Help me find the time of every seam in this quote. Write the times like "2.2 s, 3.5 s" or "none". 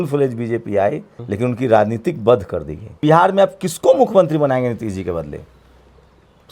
1.1 s, 2.9 s

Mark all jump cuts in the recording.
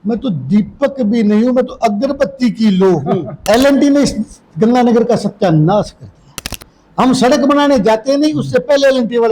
3.3 s

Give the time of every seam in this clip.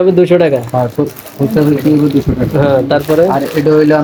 none

